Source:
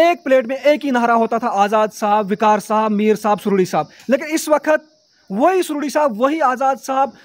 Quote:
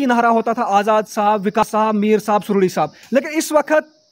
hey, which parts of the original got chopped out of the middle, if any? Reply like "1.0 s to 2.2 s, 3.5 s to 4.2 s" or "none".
2.5 s to 2.6 s